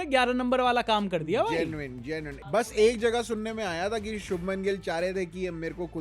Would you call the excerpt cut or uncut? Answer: cut